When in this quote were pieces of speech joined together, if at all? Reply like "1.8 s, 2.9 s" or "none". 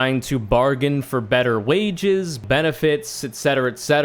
2.4 s